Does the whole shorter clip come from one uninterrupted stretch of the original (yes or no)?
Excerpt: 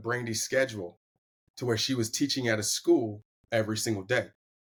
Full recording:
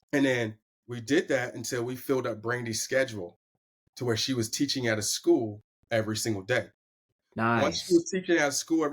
yes